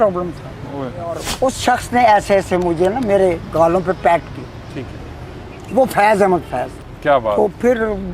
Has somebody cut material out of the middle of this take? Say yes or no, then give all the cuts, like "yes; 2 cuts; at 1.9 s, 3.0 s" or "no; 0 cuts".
yes; 1 cut; at 1.3 s